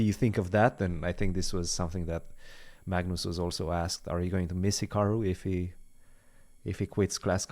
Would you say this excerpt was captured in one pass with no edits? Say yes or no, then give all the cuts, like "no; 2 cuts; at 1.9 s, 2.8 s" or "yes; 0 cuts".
yes; 0 cuts